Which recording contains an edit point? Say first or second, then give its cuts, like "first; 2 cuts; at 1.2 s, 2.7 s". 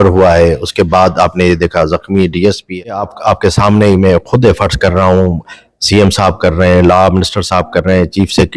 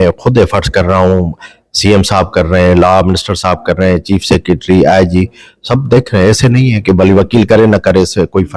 first; 1 cut; at 3.1 s